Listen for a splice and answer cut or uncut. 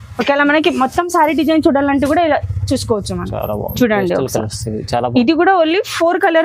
uncut